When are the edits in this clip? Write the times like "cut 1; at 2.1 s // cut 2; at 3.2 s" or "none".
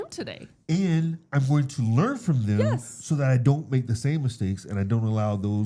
none